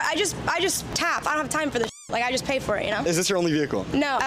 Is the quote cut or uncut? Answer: uncut